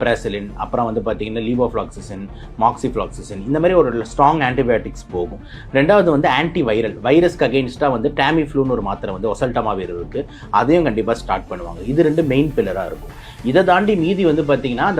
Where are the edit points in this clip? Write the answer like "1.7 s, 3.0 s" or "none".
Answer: none